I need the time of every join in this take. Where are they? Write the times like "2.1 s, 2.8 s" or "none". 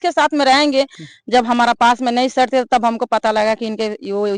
1.0 s